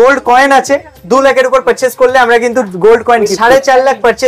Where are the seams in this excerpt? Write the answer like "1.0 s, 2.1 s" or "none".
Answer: 3.4 s